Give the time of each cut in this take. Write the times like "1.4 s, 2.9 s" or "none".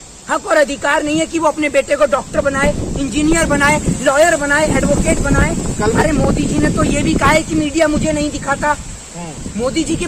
6.0 s